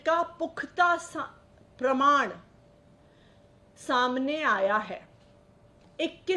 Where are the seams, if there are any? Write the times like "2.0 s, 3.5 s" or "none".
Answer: none